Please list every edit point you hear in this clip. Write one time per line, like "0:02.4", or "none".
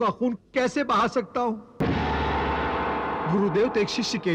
0:01.7